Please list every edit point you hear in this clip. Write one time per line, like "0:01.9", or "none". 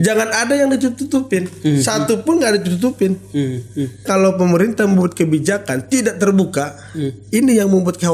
0:04.0